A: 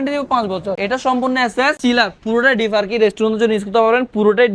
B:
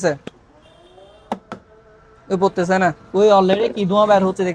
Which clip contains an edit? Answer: A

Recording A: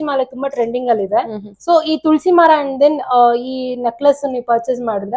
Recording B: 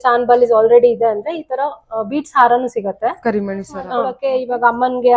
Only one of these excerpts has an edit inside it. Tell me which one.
B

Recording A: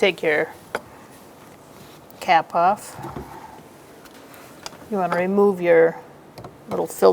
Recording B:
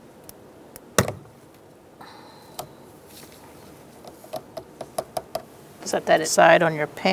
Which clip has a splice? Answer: A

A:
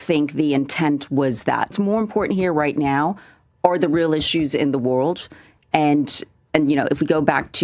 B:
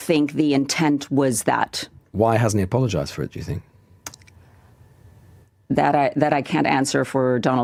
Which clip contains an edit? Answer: A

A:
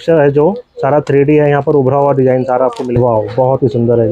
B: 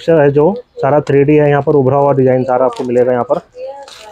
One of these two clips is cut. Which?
A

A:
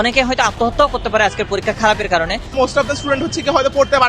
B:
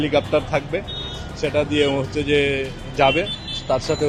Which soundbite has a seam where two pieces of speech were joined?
A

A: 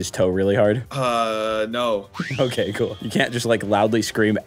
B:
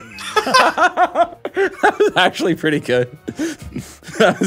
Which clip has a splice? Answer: A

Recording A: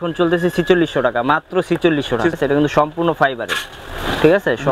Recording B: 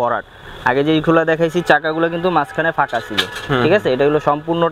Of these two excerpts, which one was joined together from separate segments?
A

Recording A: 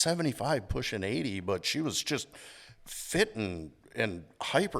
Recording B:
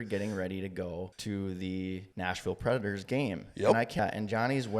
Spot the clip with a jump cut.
B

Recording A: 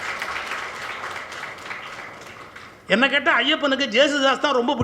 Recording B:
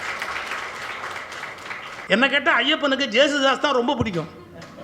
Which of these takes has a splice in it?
B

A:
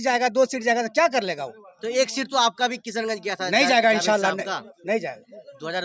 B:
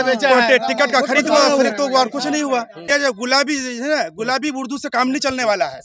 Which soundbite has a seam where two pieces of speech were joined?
B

